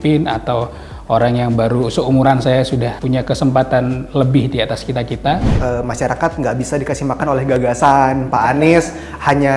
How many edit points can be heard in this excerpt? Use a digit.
2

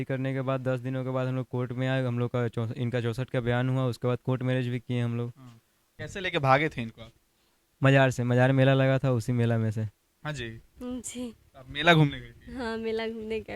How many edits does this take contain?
1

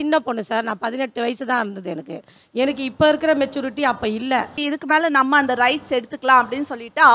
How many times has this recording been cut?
1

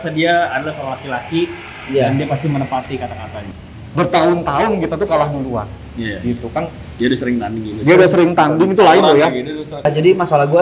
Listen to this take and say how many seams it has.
2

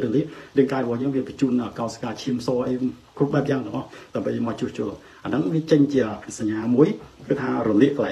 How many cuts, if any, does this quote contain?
0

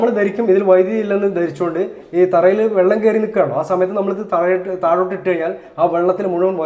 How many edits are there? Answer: 0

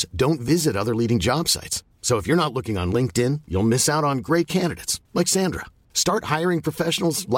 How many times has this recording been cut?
0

